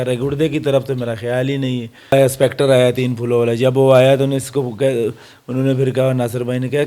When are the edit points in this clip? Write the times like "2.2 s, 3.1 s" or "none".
2.1 s